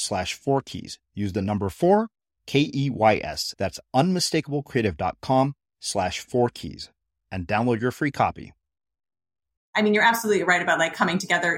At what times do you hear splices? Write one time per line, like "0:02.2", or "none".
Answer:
0:09.6